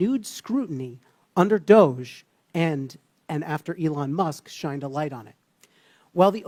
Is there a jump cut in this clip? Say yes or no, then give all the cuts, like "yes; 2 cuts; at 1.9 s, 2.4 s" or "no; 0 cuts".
no; 0 cuts